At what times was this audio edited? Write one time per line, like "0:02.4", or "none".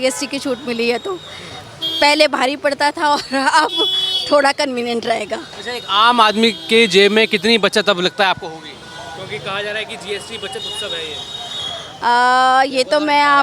none